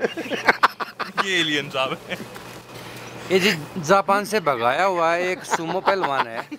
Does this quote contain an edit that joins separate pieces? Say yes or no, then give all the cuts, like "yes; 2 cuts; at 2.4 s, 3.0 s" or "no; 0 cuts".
no; 0 cuts